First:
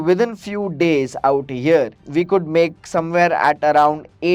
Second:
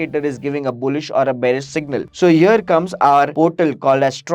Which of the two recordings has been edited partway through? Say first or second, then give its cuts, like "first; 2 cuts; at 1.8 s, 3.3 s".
second; 1 cut; at 3.3 s